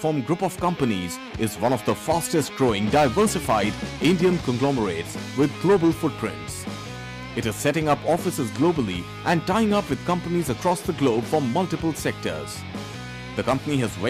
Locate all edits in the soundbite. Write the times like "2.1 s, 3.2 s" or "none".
none